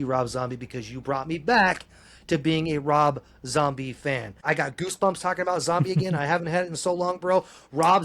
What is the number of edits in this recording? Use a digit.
1